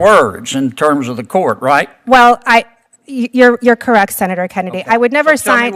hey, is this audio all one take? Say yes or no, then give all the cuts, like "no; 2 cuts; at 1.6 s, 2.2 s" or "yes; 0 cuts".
yes; 0 cuts